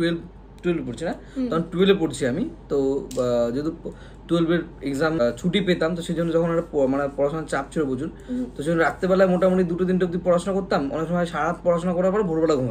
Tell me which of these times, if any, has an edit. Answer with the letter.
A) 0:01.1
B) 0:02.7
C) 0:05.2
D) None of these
C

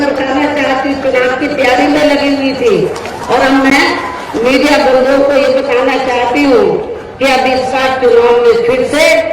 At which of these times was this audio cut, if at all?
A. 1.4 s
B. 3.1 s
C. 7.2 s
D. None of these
D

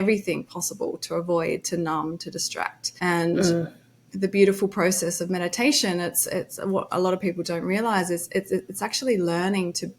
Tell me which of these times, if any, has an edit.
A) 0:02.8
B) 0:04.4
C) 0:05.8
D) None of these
A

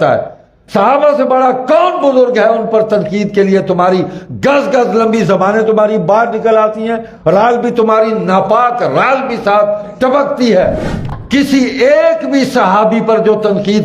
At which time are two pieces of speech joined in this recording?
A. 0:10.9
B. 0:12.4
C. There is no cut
A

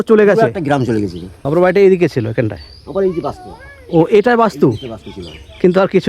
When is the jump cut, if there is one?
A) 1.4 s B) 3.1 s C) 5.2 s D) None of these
A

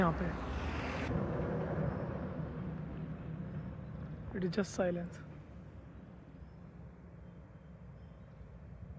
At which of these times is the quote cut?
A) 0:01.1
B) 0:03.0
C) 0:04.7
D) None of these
A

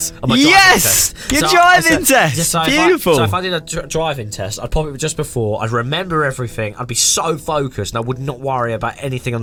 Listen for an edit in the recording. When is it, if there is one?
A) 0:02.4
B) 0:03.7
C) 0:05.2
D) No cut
D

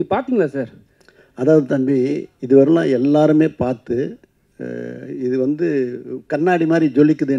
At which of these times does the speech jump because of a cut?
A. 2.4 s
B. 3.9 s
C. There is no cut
C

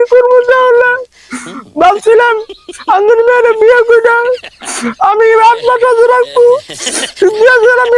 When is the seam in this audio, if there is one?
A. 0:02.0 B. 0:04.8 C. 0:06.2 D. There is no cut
D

